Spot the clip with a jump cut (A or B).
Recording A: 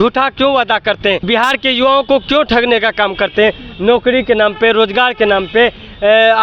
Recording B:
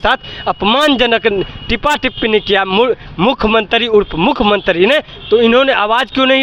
A